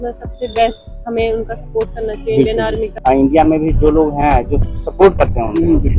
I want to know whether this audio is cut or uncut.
cut